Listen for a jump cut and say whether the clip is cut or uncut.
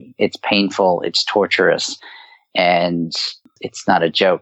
cut